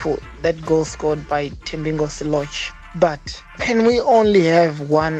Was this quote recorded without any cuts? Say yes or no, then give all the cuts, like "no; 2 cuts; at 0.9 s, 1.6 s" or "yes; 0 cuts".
yes; 0 cuts